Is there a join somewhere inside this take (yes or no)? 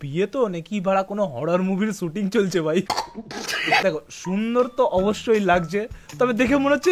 no